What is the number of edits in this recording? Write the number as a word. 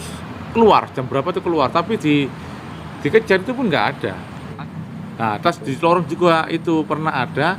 one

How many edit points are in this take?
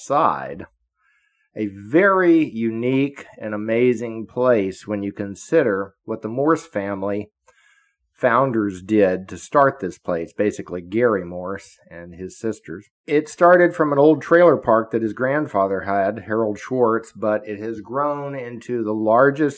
one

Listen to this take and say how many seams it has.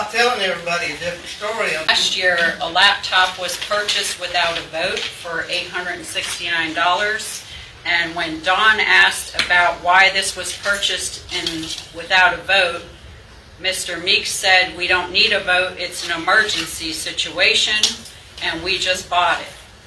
one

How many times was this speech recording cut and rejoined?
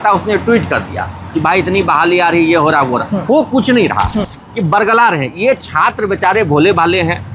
one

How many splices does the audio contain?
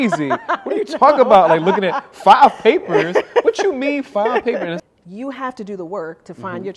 one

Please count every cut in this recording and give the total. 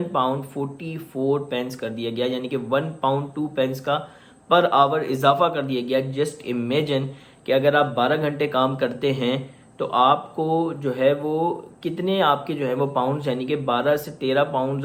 zero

